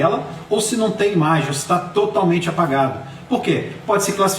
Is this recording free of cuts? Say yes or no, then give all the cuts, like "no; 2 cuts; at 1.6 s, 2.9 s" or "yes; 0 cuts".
yes; 0 cuts